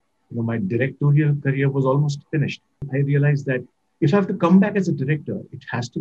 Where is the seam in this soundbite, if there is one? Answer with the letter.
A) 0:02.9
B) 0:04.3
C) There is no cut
A